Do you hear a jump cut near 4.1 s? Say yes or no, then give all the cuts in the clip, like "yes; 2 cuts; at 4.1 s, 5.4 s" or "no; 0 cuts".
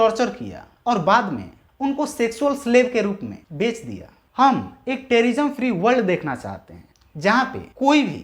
no; 0 cuts